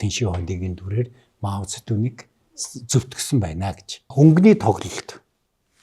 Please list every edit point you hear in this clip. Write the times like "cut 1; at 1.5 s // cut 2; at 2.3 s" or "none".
cut 1; at 4.1 s